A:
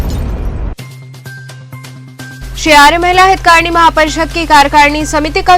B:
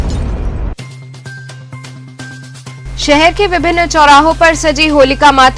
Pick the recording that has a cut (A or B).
A